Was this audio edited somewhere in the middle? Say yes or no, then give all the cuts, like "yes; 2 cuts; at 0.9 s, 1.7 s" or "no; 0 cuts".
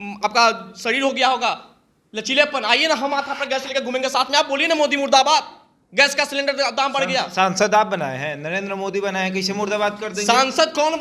no; 0 cuts